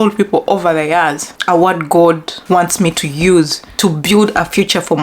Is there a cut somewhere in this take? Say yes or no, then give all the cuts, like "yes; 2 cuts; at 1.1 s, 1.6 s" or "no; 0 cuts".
yes; 3 cuts; at 1.3 s, 2.3 s, 3.6 s